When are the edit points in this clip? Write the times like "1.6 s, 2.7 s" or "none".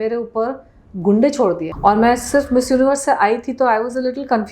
1.7 s